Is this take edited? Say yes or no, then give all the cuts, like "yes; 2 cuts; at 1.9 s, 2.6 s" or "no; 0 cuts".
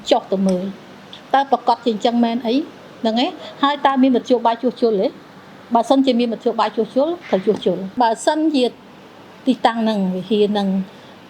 yes; 1 cut; at 8.0 s